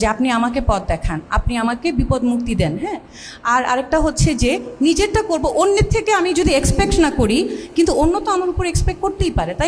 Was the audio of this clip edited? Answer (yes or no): no